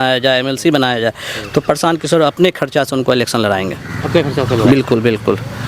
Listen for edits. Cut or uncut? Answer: uncut